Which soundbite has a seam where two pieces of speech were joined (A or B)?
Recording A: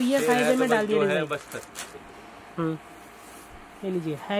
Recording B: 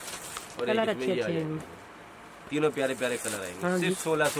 A